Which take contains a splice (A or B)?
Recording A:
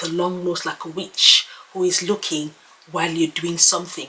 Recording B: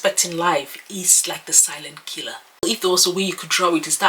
B